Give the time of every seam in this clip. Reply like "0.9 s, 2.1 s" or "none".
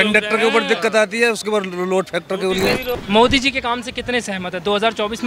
3.0 s